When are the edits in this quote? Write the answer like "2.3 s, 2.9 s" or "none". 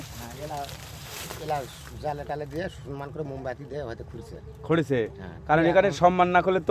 none